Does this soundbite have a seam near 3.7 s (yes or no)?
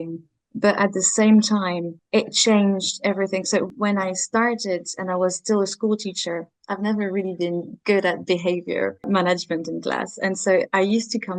yes